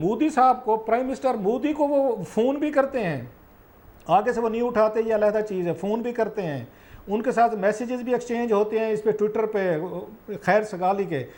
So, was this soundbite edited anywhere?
no; 0 cuts

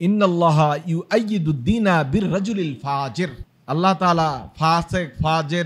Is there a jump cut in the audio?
yes; 1 cut; at 3.5 s

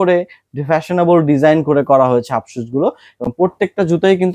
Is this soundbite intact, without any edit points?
yes; 0 cuts

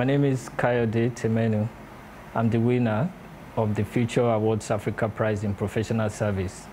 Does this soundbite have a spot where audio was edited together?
no; 0 cuts

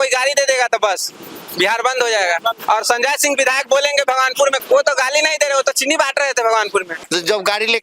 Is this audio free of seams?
no; 3 cuts; at 2.6 s, 4.6 s, 7.0 s

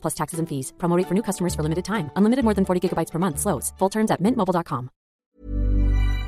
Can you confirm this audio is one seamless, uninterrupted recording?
no; 1 cut; at 5.3 s

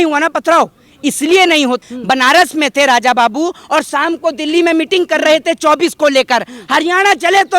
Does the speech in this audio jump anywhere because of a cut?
yes; 1 cut; at 1.8 s

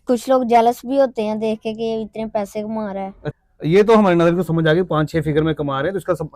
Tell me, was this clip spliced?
yes; 1 cut; at 3.2 s

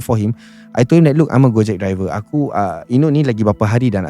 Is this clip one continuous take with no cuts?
yes; 0 cuts

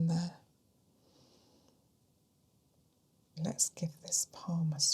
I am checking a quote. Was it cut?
yes; 1 cut; at 3.4 s

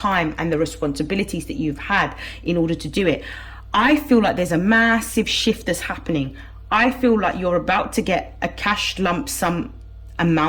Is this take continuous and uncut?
yes; 0 cuts

